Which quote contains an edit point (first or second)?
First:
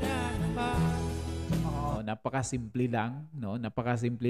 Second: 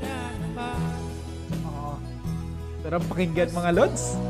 first